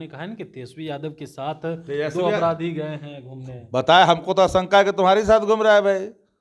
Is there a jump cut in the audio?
no; 0 cuts

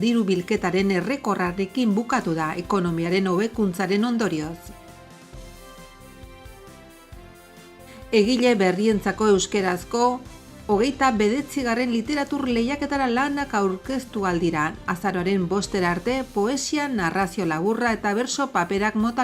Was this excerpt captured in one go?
no; 3 cuts; at 4.6 s, 6.4 s, 8.1 s

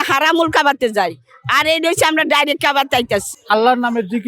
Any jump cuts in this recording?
yes; 1 cut; at 3.3 s

